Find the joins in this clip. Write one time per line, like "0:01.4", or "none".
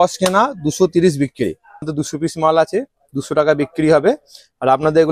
0:02.0